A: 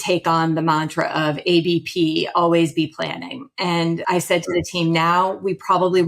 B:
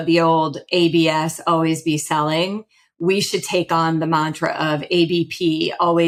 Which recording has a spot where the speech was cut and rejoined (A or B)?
A